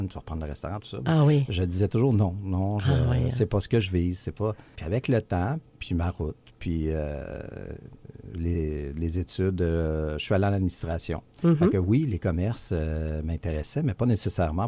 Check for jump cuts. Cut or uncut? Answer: cut